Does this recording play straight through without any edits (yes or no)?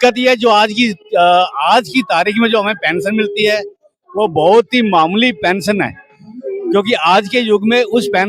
yes